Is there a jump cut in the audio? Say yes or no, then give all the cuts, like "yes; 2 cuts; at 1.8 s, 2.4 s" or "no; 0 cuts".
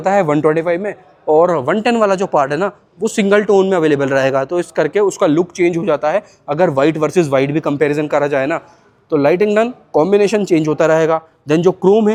no; 0 cuts